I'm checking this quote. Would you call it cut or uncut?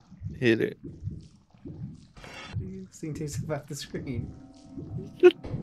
cut